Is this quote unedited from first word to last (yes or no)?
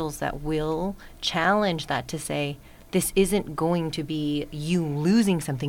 yes